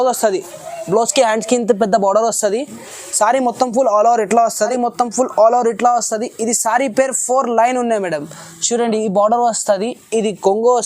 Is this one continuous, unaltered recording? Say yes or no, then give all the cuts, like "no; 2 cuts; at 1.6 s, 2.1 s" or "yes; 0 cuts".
no; 1 cut; at 4.7 s